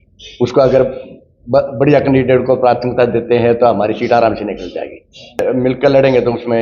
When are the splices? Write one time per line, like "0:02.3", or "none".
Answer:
0:05.4